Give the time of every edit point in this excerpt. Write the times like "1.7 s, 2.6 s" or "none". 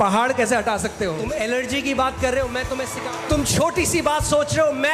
1.2 s, 2.9 s